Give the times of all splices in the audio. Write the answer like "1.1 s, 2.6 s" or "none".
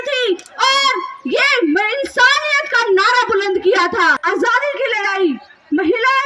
4.2 s